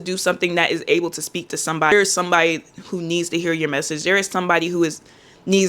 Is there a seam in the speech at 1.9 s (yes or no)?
yes